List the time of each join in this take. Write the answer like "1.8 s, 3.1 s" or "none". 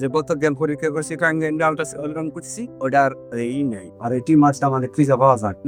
none